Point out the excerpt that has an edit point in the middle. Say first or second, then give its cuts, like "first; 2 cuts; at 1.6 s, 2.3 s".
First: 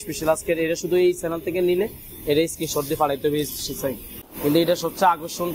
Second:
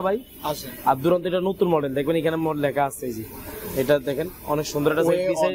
first; 1 cut; at 4.3 s